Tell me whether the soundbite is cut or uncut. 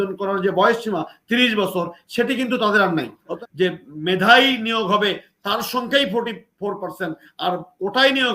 cut